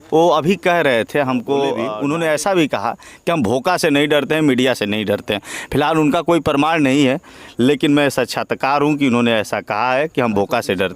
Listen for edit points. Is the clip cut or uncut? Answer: cut